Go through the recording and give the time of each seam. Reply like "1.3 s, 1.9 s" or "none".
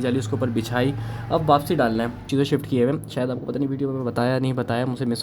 2.2 s